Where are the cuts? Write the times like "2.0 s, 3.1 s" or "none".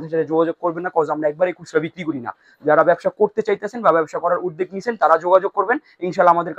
none